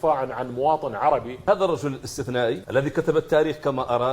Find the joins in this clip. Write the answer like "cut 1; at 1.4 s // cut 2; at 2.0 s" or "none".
cut 1; at 1.3 s